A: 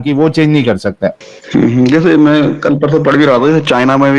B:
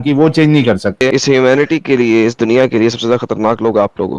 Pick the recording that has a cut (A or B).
B